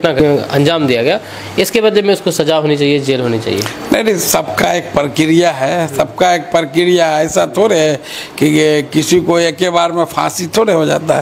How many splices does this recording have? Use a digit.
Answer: 0